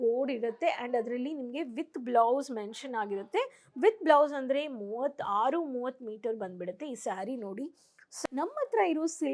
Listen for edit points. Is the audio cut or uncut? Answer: cut